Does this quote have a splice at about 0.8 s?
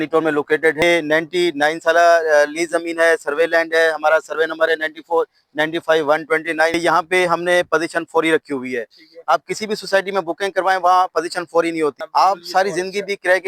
yes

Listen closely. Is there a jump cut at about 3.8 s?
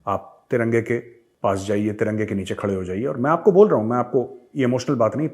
no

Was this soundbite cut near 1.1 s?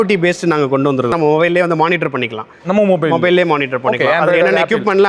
yes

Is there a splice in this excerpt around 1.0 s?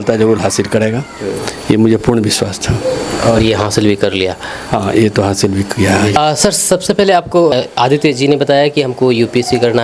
no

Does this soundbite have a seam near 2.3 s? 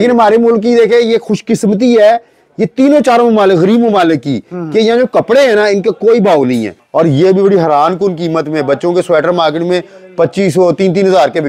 no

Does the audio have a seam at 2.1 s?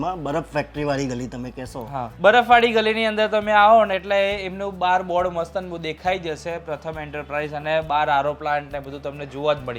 yes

